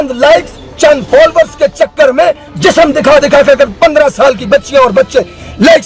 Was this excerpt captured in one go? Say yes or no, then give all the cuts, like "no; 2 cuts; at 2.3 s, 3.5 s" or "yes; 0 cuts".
yes; 0 cuts